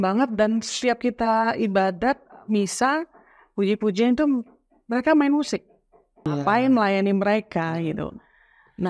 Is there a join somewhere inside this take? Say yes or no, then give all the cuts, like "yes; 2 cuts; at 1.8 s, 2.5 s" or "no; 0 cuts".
yes; 1 cut; at 6.3 s